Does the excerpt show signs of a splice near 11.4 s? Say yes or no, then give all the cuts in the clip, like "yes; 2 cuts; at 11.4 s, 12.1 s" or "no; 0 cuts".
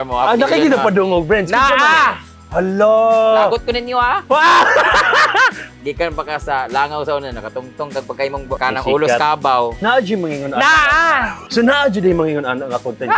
yes; 4 cuts; at 5.7 s, 8.6 s, 9.8 s, 11.4 s